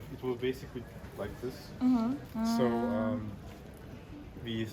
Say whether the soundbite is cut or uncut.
cut